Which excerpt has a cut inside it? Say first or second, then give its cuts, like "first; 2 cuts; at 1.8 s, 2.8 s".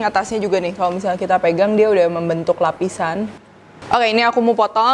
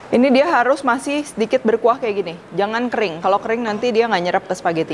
first; 1 cut; at 3.6 s